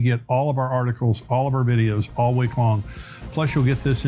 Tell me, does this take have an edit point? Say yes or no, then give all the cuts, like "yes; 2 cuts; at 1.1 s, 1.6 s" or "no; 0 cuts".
no; 0 cuts